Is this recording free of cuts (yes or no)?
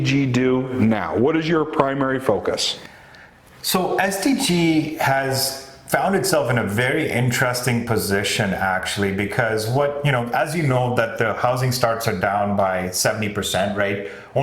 yes